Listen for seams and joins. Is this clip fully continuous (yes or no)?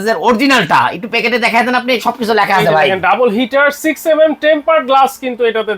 yes